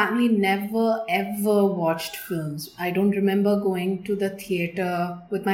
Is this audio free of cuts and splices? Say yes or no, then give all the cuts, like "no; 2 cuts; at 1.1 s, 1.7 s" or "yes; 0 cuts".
yes; 0 cuts